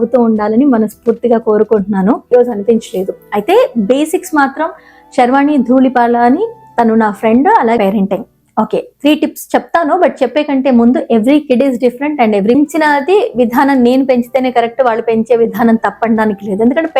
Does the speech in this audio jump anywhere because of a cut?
yes; 3 cuts; at 2.3 s, 7.8 s, 12.6 s

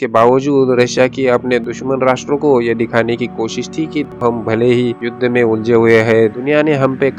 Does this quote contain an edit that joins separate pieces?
yes; 1 cut; at 4.1 s

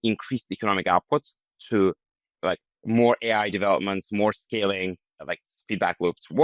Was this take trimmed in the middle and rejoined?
no; 0 cuts

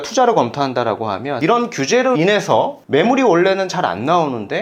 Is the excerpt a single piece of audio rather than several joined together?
no; 2 cuts; at 1.3 s, 2.8 s

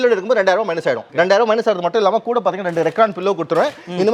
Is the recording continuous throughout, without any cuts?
yes; 0 cuts

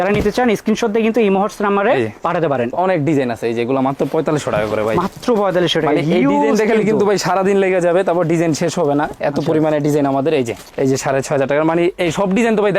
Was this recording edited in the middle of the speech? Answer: yes; 2 cuts; at 2.7 s, 10.7 s

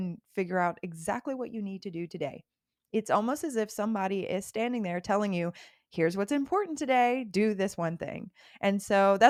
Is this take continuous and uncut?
yes; 0 cuts

